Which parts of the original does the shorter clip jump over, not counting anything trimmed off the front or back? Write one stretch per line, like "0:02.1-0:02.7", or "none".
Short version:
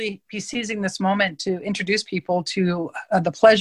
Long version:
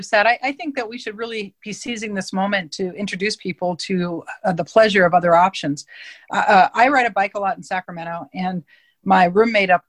none